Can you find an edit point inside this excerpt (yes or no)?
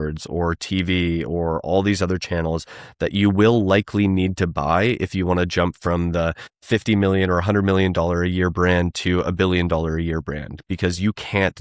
yes